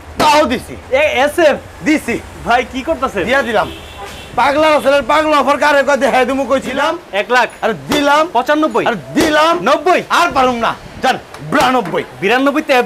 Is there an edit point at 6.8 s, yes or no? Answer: yes